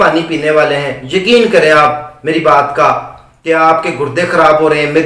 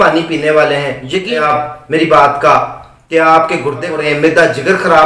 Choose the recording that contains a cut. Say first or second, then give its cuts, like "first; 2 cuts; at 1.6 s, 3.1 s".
second; 2 cuts; at 1.3 s, 3.9 s